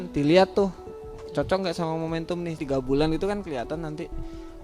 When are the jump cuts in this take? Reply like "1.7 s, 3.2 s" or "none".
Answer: 2.6 s

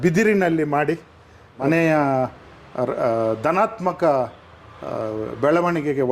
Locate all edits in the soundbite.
1.6 s

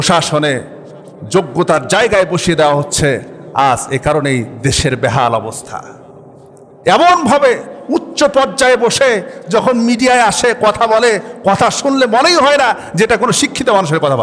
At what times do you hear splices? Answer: none

